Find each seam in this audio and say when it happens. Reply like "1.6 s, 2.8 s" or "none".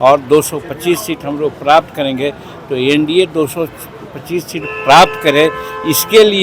none